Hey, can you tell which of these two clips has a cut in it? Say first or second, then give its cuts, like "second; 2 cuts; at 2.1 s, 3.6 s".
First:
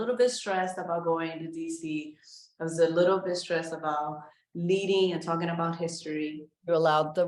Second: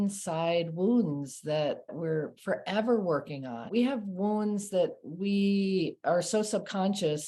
second; 2 cuts; at 1.9 s, 3.7 s